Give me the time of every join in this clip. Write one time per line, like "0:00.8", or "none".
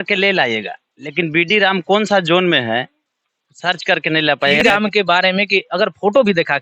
0:04.6